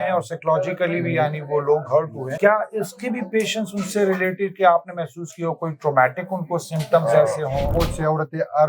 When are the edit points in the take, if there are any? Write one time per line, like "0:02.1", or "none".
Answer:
0:02.2
0:07.7